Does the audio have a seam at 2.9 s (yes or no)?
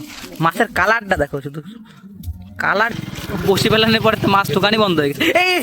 yes